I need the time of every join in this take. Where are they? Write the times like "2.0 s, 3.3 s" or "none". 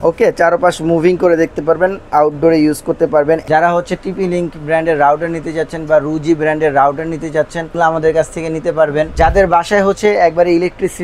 3.4 s, 7.7 s, 9.1 s